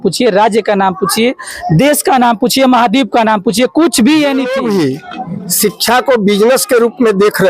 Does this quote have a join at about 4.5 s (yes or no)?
yes